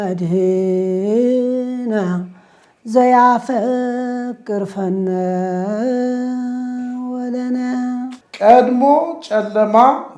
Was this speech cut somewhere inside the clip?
yes; 1 cut; at 8.2 s

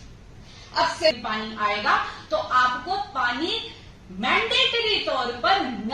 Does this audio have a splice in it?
yes; 1 cut; at 1.1 s

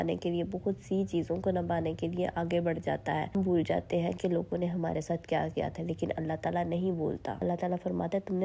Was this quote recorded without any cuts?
yes; 0 cuts

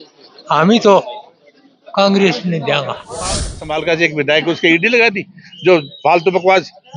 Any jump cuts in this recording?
yes; 1 cut; at 3.5 s

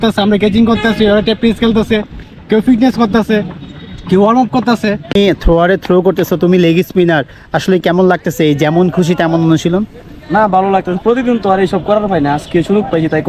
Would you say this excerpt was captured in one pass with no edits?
no; 1 cut; at 5.1 s

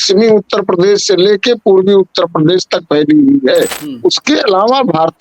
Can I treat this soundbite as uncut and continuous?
no; 1 cut; at 3.8 s

